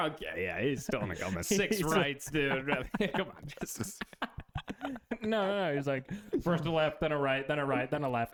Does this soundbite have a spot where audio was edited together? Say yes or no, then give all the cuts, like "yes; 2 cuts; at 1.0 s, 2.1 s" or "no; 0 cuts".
no; 0 cuts